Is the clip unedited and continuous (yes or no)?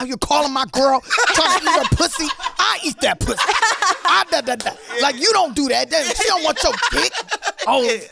yes